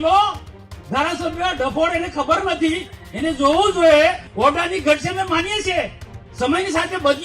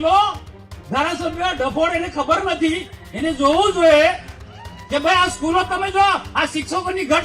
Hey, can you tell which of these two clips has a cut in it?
first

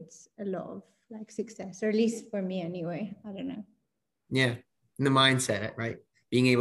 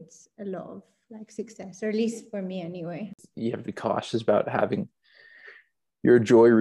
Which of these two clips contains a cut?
second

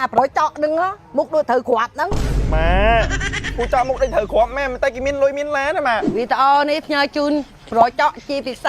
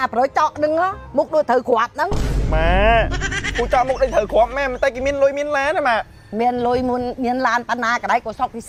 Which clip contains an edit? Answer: first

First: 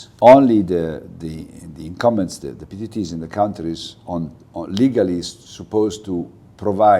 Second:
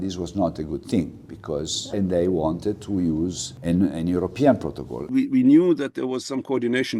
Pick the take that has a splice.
second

